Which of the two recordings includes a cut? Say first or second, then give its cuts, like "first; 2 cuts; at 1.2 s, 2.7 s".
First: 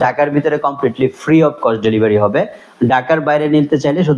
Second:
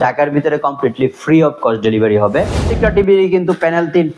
second; 1 cut; at 2.7 s